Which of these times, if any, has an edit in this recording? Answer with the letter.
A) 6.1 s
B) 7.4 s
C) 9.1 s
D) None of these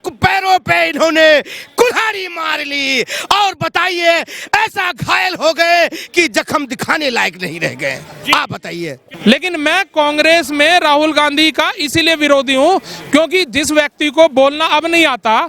C